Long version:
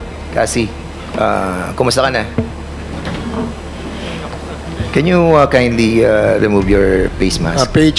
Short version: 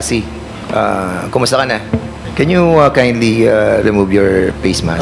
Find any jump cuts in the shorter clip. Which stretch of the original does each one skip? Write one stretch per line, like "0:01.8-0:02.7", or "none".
0:02.6-0:04.8